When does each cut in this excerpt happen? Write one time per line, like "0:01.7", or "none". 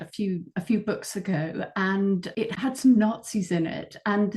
0:02.4